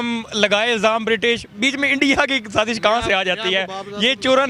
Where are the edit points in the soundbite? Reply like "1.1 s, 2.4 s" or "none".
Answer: none

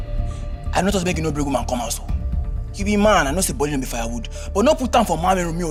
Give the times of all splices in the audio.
none

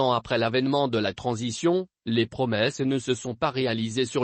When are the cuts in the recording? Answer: none

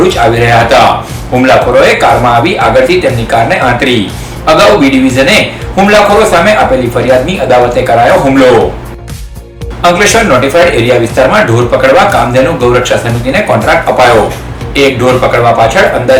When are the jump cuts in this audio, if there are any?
none

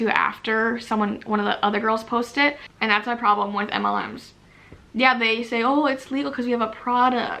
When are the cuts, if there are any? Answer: 2.6 s

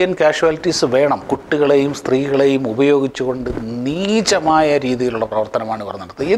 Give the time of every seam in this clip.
none

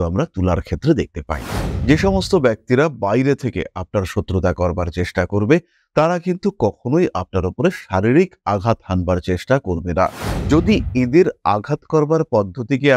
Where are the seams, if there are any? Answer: 1.7 s, 10.3 s

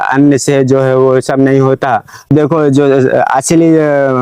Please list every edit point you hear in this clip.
2.3 s

